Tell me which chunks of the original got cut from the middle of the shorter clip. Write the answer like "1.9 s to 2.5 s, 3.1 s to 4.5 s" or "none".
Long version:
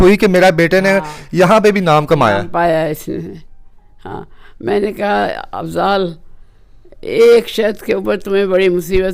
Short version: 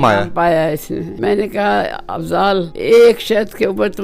3.3 s to 4.5 s, 6.2 s to 7.0 s